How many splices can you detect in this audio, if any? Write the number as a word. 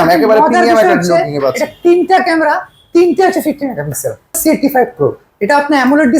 one